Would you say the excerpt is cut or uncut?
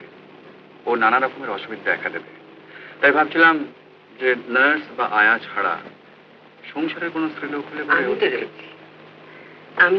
uncut